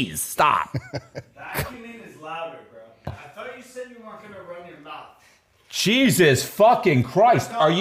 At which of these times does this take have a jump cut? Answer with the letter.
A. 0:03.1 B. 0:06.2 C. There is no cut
A